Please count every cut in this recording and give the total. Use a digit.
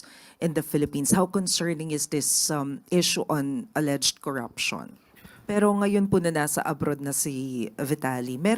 1